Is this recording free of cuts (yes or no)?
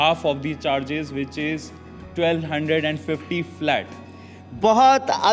yes